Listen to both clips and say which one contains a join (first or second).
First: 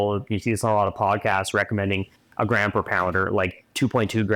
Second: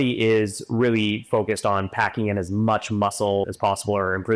second